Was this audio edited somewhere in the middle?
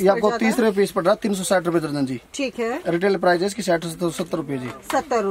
no; 0 cuts

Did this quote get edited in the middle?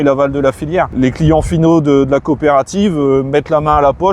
yes; 1 cut; at 0.9 s

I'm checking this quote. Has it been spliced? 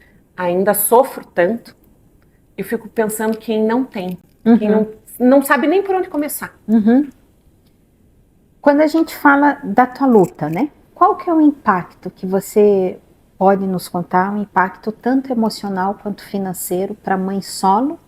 no; 0 cuts

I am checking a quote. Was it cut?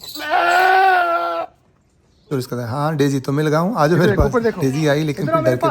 yes; 1 cut; at 2.3 s

